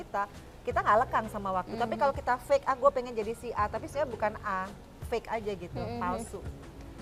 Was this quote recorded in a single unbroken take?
yes; 0 cuts

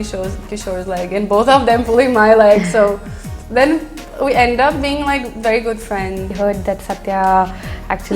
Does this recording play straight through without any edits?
no; 1 cut; at 6.3 s

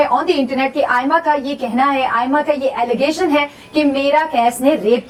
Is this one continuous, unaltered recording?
yes; 0 cuts

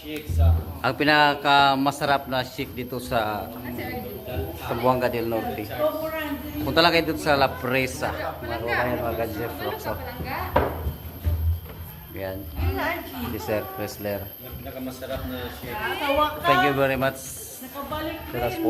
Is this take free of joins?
no; 1 cut; at 15.8 s

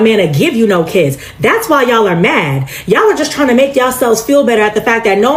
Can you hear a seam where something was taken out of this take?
no; 0 cuts

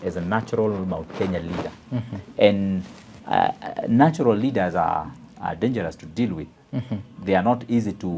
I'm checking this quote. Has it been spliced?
no; 0 cuts

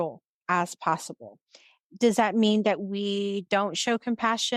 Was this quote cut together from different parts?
no; 0 cuts

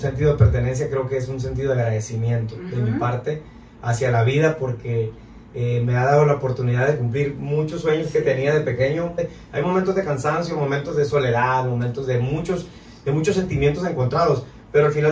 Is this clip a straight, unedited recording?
no; 1 cut; at 9.1 s

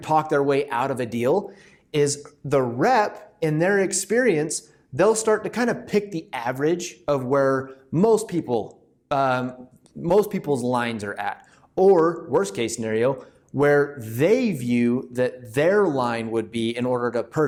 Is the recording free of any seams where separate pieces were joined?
yes; 0 cuts

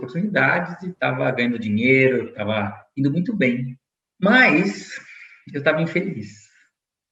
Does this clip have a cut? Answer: no; 0 cuts

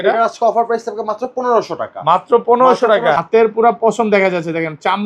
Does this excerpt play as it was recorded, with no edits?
no; 1 cut; at 3.2 s

